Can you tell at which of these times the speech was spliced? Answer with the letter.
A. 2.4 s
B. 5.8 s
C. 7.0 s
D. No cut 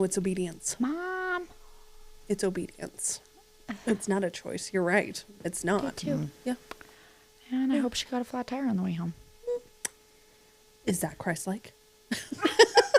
B